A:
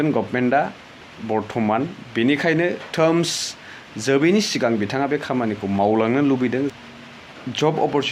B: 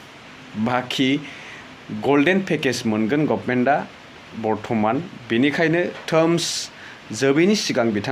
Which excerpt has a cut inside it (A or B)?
A